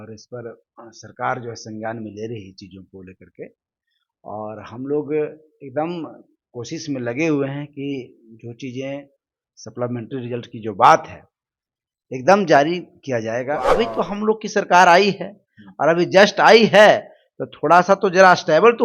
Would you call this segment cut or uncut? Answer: cut